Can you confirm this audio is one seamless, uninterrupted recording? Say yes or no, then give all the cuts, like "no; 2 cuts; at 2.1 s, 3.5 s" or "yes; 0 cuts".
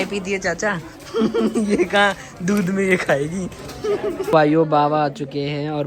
no; 1 cut; at 4.3 s